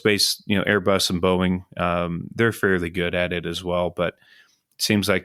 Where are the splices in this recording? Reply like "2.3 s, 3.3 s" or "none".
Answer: none